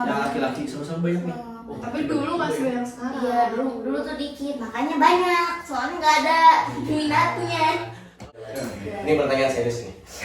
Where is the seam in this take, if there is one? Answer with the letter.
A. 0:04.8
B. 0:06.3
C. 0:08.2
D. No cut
C